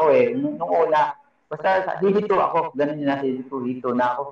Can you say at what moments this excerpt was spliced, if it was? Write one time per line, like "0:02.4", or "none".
none